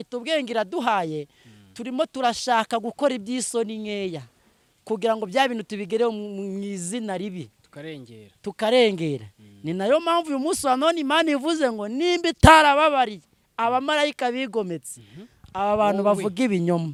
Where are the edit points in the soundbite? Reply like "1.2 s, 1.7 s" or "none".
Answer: none